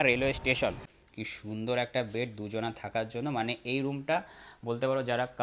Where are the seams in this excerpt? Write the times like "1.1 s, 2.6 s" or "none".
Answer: 0.9 s